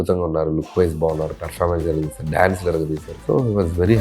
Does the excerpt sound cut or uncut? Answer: cut